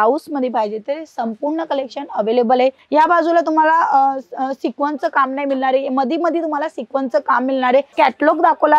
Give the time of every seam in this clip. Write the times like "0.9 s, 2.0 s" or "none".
2.8 s, 7.9 s